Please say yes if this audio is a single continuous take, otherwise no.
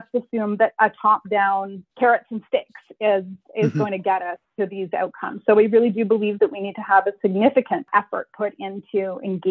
no